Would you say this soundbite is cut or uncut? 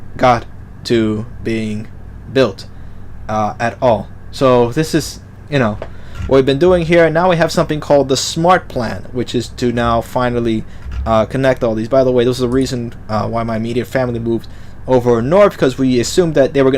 cut